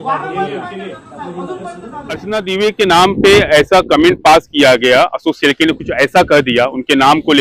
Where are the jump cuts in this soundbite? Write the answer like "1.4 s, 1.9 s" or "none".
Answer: 2.2 s